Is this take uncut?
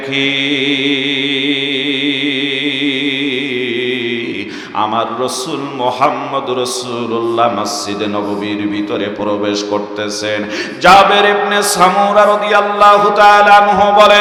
yes; 0 cuts

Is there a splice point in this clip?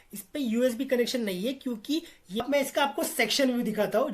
yes; 1 cut; at 2.2 s

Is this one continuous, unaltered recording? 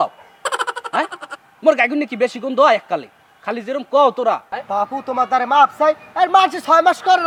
yes; 0 cuts

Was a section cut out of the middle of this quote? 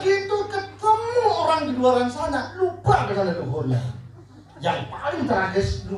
no; 0 cuts

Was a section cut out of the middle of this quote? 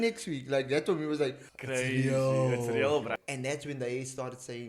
yes; 2 cuts; at 1.5 s, 3.1 s

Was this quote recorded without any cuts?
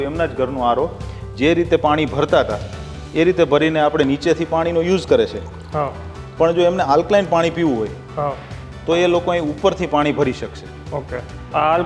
yes; 0 cuts

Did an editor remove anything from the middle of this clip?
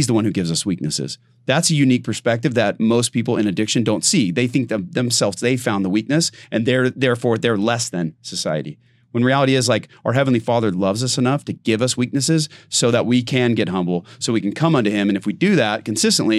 no; 0 cuts

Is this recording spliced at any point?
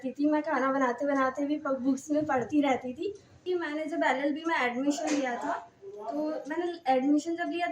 yes; 1 cut; at 3.3 s

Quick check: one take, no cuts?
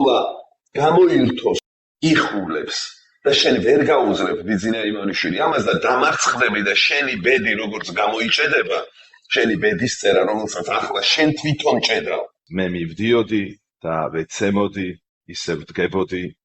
no; 2 cuts; at 1.6 s, 12.4 s

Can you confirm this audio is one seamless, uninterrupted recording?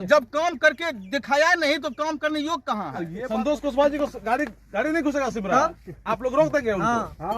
no; 1 cut; at 3.1 s

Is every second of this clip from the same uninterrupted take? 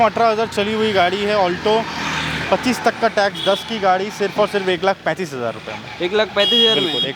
yes; 0 cuts

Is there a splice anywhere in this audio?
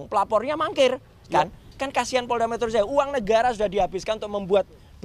yes; 1 cut; at 1.6 s

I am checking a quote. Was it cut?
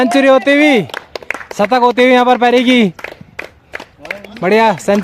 no; 0 cuts

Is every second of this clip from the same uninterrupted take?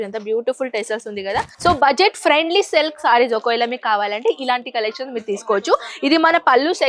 no; 1 cut; at 1.5 s

